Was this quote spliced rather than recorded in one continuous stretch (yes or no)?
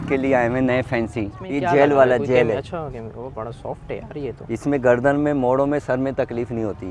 yes